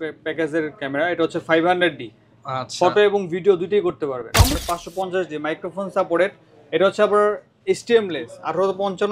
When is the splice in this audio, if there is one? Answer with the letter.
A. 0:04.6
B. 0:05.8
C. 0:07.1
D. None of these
A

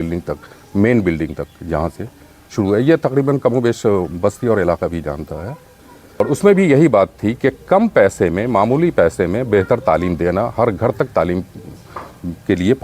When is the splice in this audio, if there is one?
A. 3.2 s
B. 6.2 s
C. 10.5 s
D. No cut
B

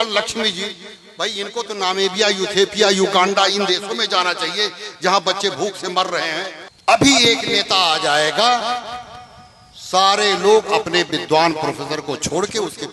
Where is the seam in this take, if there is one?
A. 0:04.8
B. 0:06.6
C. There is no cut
B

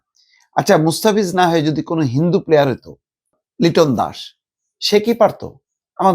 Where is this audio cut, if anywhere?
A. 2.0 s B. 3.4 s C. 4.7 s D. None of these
B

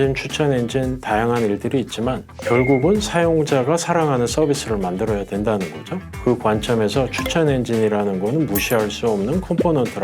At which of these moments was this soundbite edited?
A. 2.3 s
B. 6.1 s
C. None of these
A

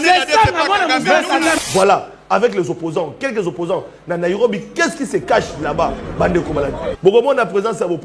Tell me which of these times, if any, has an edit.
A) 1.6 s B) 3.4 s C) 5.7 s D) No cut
A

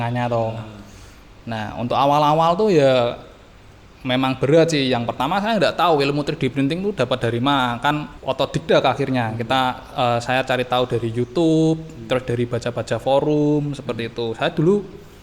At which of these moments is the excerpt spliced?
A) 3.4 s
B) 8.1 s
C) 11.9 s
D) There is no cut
B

